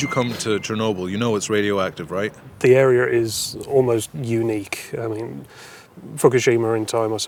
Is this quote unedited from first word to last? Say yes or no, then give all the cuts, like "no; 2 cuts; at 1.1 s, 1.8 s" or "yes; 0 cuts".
yes; 0 cuts